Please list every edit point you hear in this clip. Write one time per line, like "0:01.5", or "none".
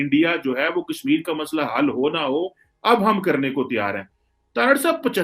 none

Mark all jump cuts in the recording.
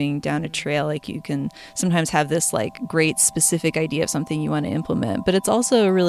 none

